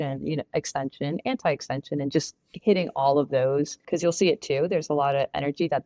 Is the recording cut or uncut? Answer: cut